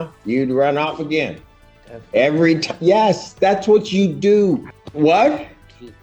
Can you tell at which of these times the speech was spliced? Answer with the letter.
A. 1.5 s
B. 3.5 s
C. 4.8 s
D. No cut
C